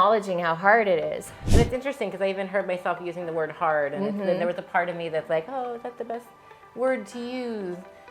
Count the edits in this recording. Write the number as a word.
one